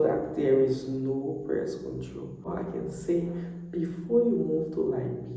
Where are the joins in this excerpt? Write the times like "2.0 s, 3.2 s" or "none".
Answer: 2.5 s